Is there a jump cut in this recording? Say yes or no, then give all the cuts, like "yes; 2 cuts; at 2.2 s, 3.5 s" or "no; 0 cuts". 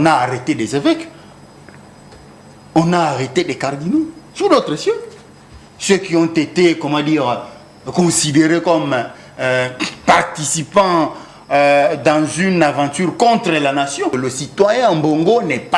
yes; 1 cut; at 14.2 s